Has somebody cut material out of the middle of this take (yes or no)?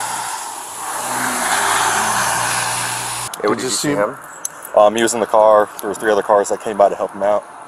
yes